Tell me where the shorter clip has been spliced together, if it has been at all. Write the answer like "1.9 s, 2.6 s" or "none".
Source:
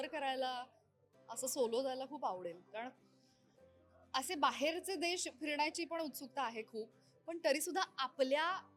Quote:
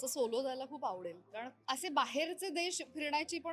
1.5 s